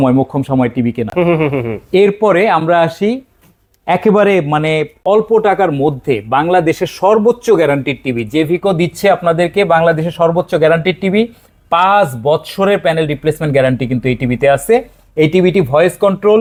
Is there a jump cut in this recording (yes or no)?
no